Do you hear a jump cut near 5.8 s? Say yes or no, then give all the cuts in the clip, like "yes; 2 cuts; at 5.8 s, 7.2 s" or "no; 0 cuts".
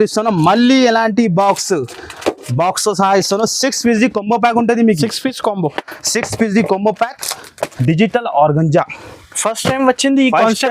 no; 1 cut; at 7.7 s